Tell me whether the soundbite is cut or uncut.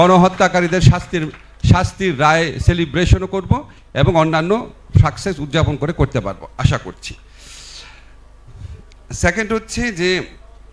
uncut